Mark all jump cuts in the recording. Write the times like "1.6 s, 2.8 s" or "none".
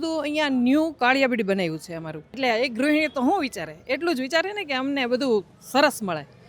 2.3 s